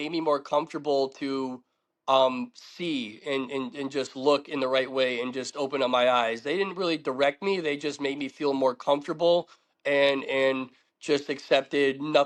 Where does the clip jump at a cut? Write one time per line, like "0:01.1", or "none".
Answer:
none